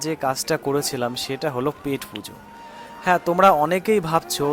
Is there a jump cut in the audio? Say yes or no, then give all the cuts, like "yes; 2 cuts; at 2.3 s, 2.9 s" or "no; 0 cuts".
no; 0 cuts